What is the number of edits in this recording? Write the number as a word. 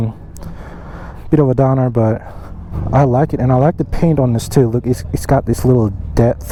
zero